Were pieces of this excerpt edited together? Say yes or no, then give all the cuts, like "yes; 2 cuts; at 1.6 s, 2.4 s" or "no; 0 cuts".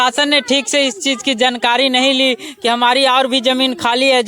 no; 0 cuts